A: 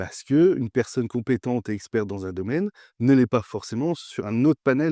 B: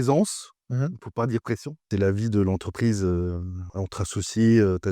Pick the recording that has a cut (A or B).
B